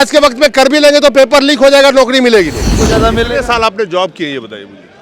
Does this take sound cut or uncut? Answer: cut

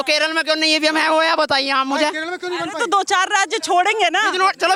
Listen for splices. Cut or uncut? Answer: uncut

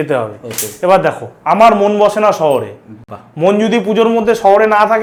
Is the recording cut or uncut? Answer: uncut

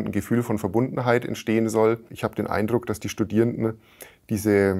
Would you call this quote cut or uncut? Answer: cut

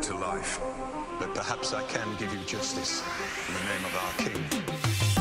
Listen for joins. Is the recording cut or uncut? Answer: uncut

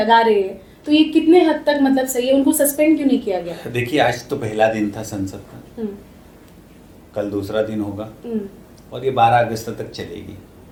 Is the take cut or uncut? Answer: uncut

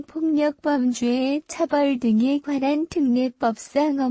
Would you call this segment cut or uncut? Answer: uncut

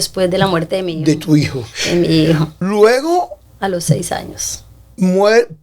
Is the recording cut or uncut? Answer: cut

